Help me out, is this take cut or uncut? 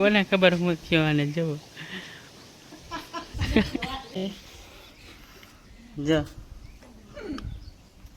cut